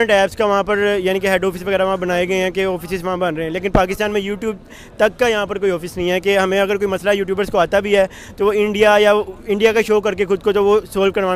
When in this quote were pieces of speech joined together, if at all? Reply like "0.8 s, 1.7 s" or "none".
none